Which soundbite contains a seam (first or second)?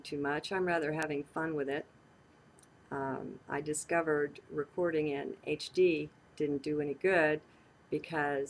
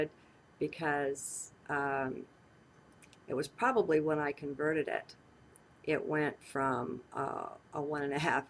second